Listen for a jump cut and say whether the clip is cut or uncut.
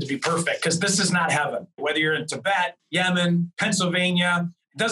cut